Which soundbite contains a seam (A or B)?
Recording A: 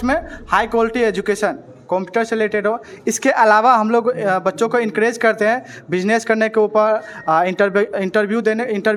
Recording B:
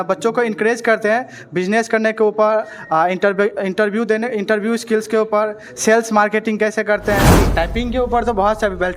B